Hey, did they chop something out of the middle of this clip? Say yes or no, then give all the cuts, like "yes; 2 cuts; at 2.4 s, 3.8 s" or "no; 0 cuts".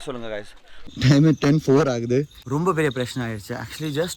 yes; 2 cuts; at 0.9 s, 2.4 s